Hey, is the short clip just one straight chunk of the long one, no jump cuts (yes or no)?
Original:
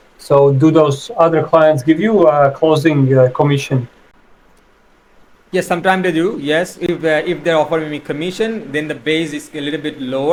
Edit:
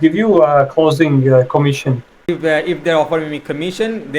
no